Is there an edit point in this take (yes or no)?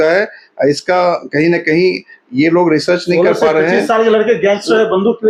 no